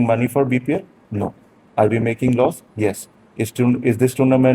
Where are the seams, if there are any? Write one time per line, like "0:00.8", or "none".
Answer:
none